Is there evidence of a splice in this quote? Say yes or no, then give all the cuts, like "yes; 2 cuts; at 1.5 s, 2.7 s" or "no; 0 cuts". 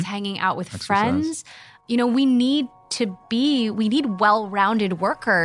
no; 0 cuts